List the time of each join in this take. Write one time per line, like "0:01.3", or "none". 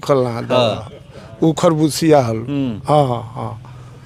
none